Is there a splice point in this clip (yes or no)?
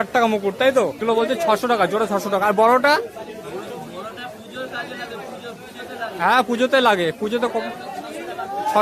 yes